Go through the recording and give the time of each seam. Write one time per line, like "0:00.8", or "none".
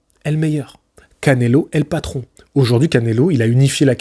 none